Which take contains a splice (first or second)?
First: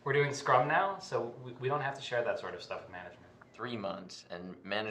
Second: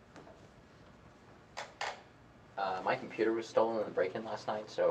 first